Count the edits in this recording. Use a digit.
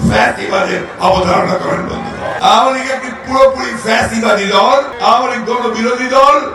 2